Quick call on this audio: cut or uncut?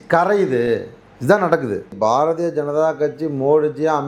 cut